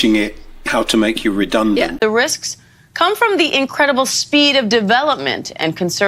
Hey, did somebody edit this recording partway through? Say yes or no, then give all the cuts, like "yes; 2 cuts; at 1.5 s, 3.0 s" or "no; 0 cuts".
yes; 1 cut; at 2.0 s